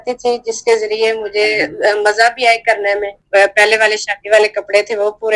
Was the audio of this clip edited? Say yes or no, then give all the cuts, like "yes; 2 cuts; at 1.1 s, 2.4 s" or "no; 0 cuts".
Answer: yes; 1 cut; at 3.2 s